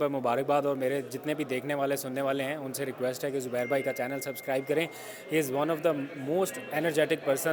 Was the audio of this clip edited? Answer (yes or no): no